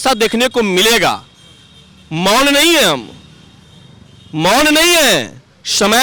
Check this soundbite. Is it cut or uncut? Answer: uncut